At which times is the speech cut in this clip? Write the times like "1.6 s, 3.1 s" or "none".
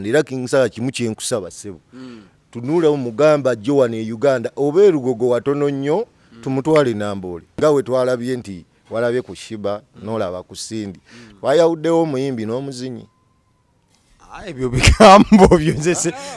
7.4 s